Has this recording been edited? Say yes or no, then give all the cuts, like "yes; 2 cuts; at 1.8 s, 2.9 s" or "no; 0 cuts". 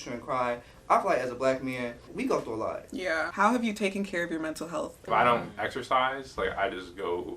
yes; 3 cuts; at 2.1 s, 3.3 s, 5.0 s